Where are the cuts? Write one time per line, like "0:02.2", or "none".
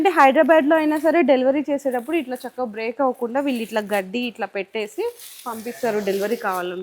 none